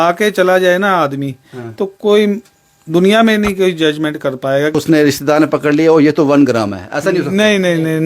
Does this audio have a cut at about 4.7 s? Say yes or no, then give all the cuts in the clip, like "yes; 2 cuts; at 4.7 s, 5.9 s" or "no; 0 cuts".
yes; 1 cut; at 4.7 s